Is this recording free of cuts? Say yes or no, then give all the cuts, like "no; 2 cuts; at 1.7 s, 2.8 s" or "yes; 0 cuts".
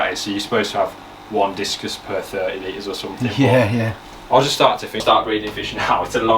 no; 1 cut; at 5.0 s